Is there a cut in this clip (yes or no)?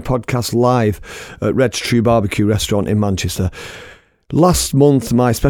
no